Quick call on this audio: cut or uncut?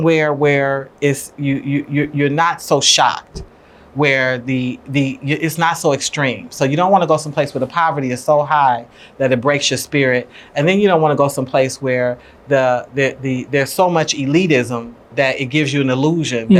uncut